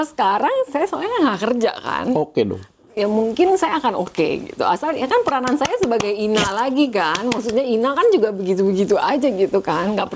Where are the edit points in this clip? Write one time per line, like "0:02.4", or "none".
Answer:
none